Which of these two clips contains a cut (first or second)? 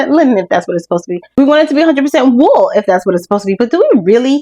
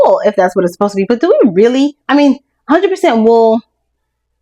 first